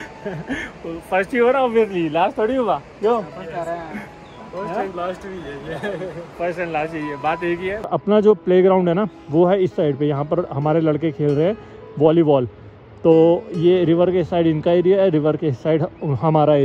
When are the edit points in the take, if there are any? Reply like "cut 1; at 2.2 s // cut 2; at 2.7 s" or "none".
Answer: cut 1; at 7.9 s